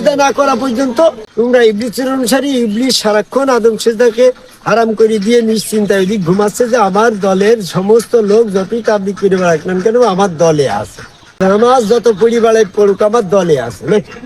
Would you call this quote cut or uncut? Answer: cut